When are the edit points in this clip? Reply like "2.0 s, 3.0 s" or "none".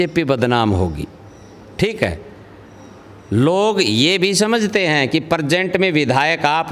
none

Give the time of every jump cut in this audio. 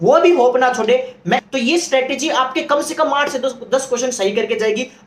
1.5 s

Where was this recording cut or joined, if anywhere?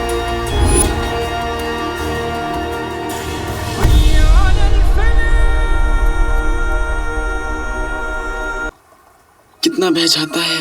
8.8 s

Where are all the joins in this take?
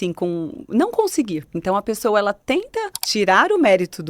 1.5 s, 3.0 s

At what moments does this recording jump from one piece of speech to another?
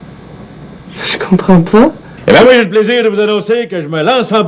2.1 s

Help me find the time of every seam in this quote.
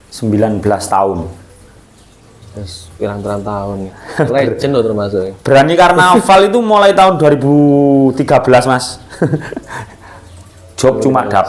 1.6 s

